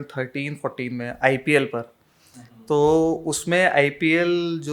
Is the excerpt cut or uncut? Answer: uncut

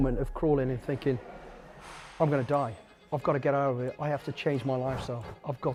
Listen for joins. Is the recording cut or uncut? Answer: uncut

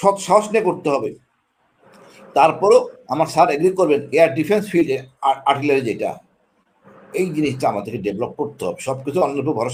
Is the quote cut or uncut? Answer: uncut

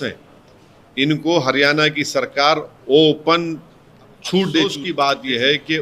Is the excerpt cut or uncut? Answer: cut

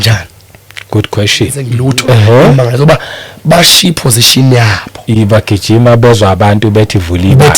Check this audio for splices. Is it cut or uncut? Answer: cut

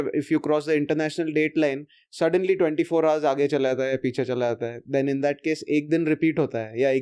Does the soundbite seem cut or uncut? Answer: uncut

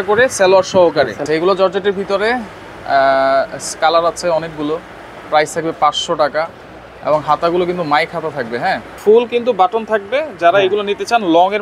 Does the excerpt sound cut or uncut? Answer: cut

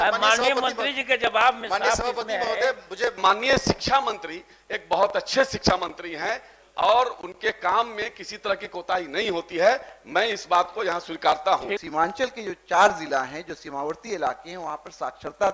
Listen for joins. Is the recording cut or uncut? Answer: cut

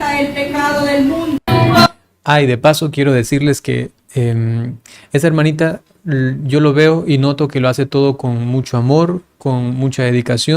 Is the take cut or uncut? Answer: cut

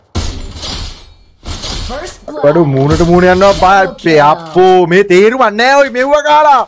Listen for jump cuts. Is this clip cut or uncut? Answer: cut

